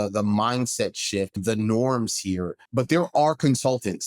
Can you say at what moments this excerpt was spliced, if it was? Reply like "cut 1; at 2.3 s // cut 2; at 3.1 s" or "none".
cut 1; at 1.4 s // cut 2; at 2.6 s